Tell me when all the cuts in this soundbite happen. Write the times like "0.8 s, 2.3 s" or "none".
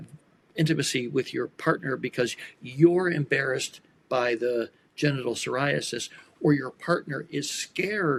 none